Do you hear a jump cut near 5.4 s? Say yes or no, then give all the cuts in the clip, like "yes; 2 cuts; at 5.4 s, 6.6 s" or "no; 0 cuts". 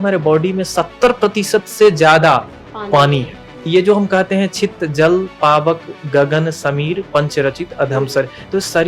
no; 1 cut; at 3.6 s